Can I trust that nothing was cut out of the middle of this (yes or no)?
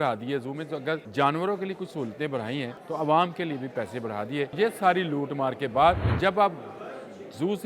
no